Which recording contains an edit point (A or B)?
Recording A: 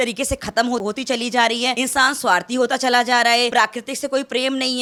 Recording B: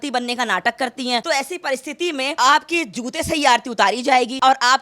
B